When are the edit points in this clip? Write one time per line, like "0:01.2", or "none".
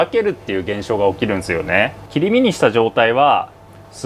0:02.0